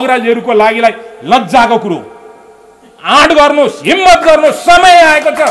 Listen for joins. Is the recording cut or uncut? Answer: uncut